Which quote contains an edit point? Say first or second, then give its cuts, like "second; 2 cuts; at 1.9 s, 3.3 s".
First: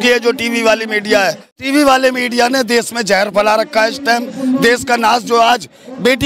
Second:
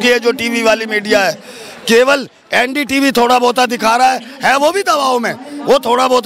first; 1 cut; at 1.6 s